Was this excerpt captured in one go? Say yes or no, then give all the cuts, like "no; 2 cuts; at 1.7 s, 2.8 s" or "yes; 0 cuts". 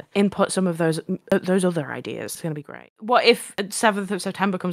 no; 1 cut; at 2.8 s